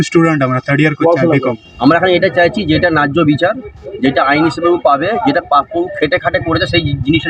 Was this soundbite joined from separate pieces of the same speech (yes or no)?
yes